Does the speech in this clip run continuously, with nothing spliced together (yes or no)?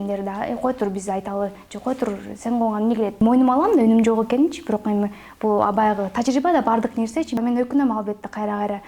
no